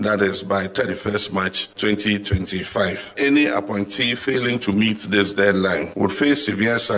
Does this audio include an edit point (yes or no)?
yes